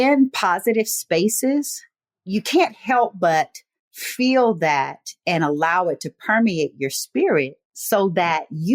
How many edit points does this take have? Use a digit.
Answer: 0